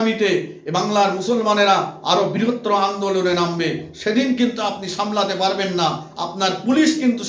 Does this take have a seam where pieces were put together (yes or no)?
no